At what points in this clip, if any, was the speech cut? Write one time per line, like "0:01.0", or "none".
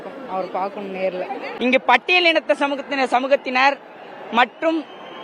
0:01.4